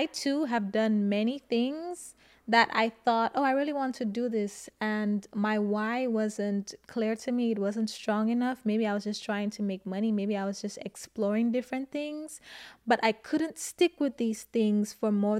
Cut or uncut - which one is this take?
uncut